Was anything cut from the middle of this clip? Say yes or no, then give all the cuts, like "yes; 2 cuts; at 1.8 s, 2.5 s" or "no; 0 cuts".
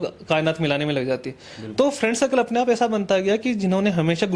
no; 0 cuts